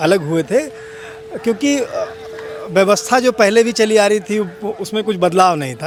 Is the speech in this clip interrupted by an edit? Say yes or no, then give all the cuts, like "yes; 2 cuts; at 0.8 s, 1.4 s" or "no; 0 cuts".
no; 0 cuts